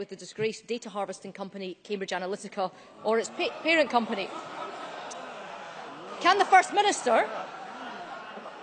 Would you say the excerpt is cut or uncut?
cut